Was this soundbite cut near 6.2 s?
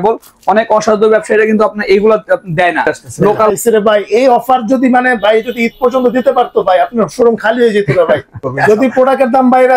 no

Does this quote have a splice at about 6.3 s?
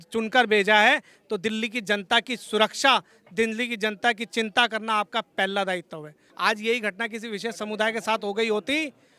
yes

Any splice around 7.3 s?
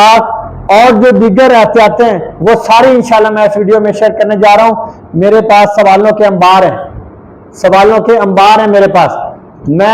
no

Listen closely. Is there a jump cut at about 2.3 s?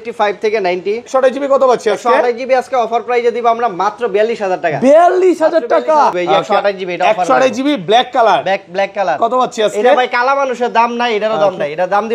no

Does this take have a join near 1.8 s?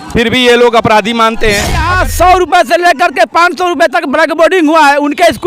yes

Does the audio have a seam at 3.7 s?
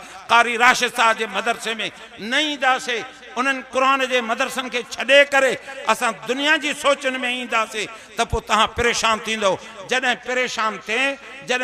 no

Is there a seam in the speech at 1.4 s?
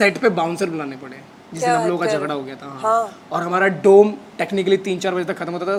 no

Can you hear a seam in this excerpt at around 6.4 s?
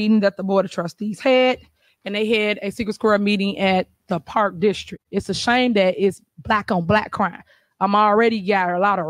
no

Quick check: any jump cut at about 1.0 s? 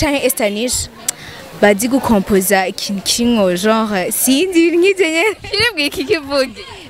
no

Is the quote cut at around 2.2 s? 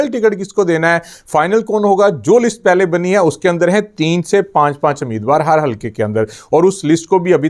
no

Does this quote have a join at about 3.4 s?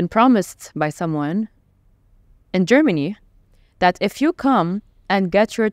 no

